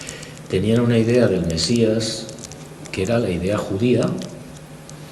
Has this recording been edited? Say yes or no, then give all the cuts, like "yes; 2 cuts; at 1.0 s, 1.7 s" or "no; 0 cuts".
no; 0 cuts